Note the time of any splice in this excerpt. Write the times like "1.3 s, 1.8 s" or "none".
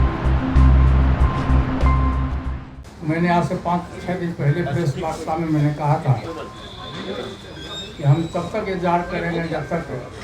2.5 s